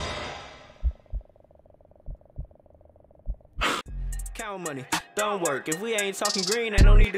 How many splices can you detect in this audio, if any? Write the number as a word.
one